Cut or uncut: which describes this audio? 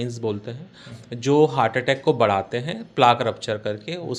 uncut